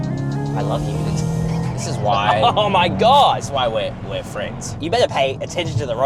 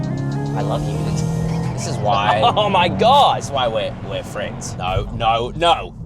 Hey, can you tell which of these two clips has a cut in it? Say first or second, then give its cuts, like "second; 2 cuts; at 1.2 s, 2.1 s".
second; 1 cut; at 4.7 s